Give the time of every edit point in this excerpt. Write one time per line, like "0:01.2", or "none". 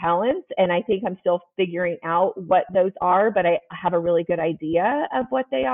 none